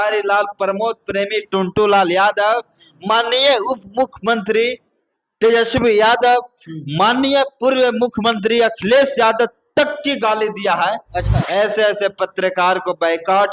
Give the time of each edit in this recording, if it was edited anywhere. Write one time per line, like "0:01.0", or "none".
0:11.4

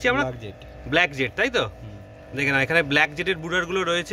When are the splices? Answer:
none

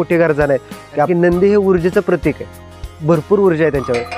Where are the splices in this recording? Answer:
0:01.1

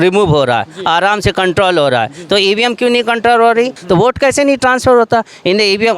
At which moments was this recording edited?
0:03.8

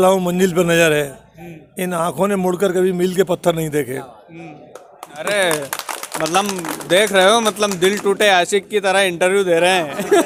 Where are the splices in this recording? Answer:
none

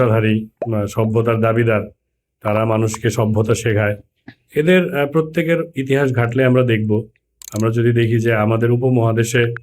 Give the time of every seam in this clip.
none

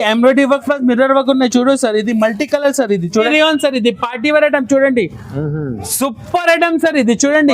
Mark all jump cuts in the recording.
0:03.3

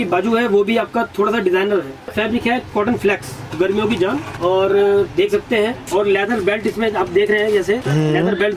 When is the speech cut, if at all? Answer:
0:02.0
0:03.5
0:04.3
0:05.9

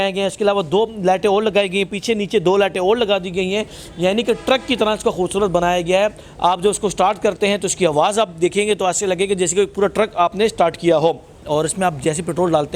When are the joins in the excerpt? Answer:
0:11.4

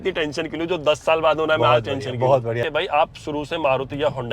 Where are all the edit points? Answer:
0:02.6

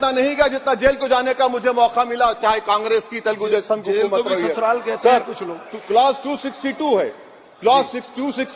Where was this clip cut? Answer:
none

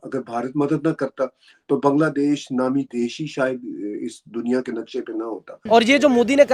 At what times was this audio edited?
0:05.6

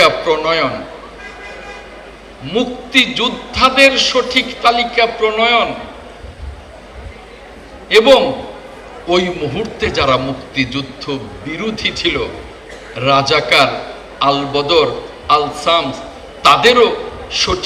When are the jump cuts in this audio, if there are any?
none

